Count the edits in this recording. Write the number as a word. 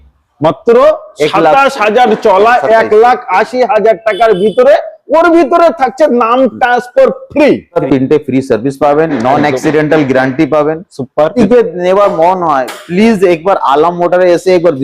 two